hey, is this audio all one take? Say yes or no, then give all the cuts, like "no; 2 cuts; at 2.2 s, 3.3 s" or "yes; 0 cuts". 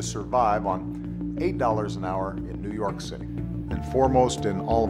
yes; 0 cuts